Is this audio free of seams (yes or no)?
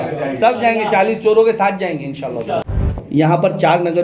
no